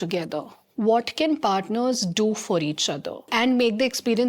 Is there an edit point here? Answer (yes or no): yes